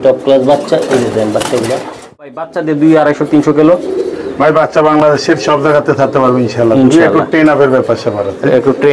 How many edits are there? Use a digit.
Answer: 1